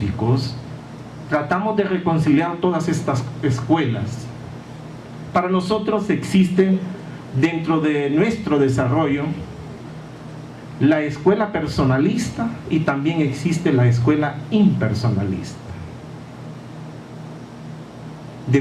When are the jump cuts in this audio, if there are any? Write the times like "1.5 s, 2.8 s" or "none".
none